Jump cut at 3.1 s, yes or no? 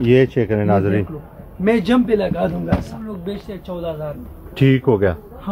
yes